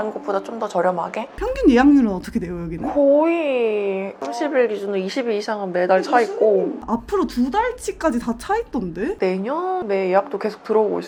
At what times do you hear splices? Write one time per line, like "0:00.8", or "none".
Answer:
none